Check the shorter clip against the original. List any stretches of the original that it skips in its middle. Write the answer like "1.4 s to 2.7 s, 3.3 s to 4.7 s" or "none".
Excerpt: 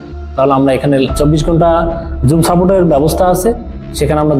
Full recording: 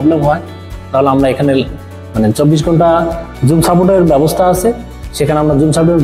1.7 s to 2.3 s